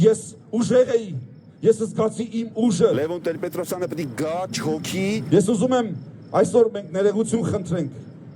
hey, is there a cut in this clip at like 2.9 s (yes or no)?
yes